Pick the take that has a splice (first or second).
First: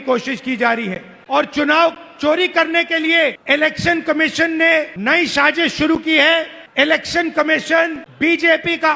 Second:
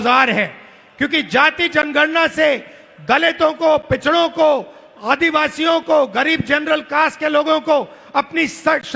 first